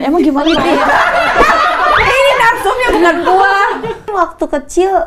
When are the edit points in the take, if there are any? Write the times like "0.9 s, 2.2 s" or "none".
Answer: 4.0 s